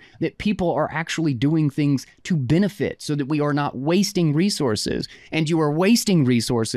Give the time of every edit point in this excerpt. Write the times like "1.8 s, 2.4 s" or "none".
none